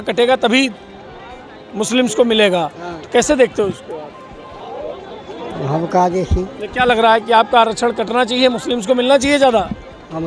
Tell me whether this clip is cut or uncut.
uncut